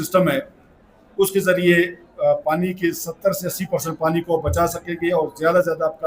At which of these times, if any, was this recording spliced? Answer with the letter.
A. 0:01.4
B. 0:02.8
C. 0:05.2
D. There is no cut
D